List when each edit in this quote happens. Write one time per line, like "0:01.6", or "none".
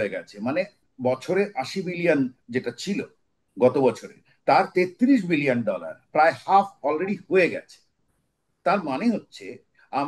none

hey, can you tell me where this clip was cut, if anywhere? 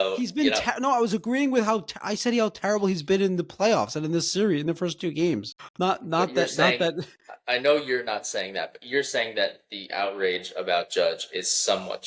0:05.6

